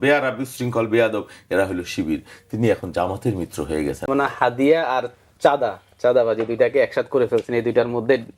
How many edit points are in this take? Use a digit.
1